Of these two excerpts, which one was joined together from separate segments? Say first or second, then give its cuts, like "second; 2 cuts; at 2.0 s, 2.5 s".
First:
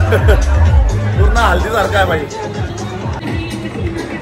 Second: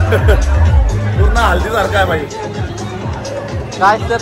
first; 1 cut; at 3.2 s